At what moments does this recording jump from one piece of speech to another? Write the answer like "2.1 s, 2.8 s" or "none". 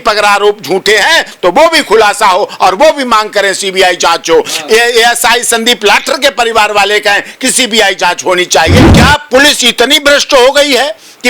8.8 s